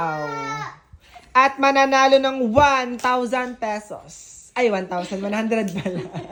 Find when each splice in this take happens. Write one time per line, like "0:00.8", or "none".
none